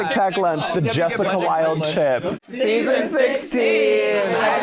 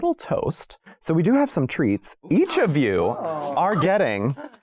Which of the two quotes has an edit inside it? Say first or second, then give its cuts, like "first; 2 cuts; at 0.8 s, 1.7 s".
first; 1 cut; at 2.3 s